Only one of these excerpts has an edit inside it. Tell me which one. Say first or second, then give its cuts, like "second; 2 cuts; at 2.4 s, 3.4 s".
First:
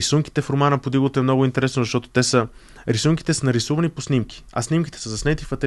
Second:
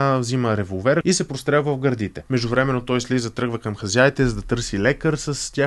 second; 2 cuts; at 1.0 s, 2.1 s